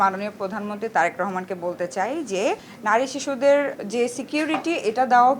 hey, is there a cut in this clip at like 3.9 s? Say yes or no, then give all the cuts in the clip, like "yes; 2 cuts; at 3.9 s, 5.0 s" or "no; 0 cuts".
no; 1 cut; at 2.6 s